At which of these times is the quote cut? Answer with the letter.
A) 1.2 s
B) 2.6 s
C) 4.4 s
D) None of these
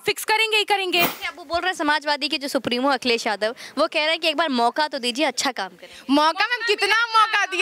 A